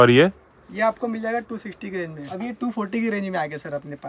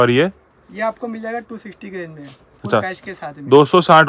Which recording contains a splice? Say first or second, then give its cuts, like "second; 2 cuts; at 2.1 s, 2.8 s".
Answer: first; 1 cut; at 2.4 s